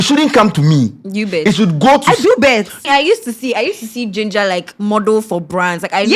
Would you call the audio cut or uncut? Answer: cut